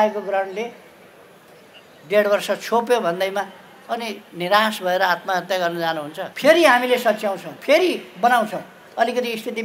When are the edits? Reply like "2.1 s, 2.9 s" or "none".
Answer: 6.2 s